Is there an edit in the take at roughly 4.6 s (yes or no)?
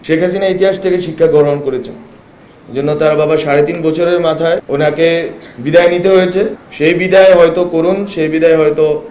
yes